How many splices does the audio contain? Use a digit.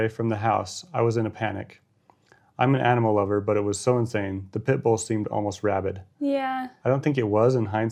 0